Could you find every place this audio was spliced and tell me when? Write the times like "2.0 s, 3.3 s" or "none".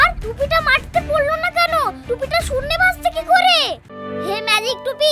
4.0 s